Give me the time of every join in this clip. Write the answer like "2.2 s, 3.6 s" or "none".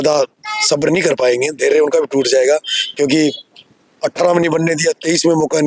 none